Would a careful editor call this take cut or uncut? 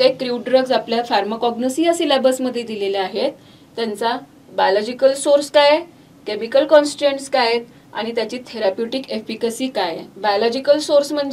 uncut